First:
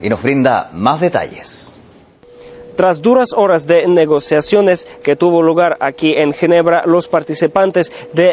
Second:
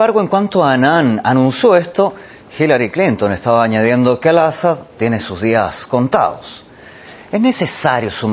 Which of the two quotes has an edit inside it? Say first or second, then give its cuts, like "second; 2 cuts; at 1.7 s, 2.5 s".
second; 1 cut; at 4.6 s